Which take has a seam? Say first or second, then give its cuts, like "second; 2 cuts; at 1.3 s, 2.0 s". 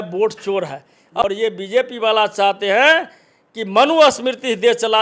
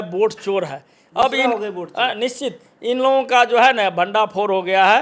first; 1 cut; at 1.2 s